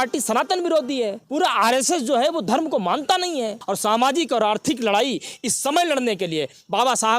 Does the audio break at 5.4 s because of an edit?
no; 1 cut; at 1.2 s

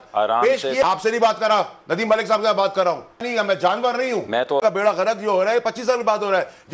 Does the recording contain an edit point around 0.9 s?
yes; 3 cuts; at 0.9 s, 3.3 s, 4.8 s

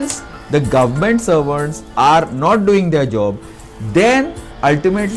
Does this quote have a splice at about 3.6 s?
no; 0 cuts

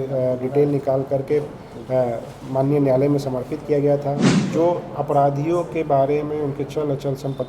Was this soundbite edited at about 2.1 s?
no; 1 cut; at 4.3 s

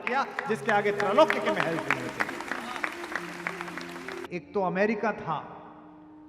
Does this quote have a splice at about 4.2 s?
yes; 1 cut; at 4.2 s

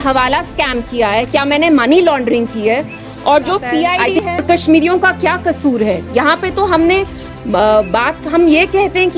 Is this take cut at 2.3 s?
no; 1 cut; at 4.0 s

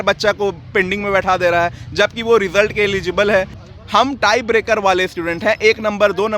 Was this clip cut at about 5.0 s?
no; 1 cut; at 3.6 s

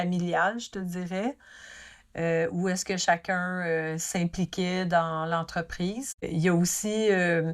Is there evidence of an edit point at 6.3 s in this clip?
yes; 1 cut; at 6.3 s

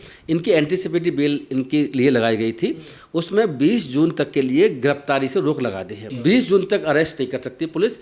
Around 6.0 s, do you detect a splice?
yes; 1 cut; at 6.0 s

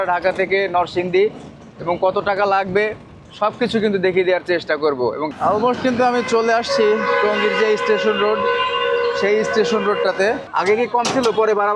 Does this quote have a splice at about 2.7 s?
no; 2 cuts; at 5.2 s, 10.5 s

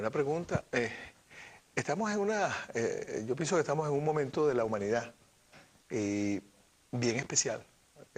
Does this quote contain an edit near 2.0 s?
yes; 1 cut; at 2.0 s

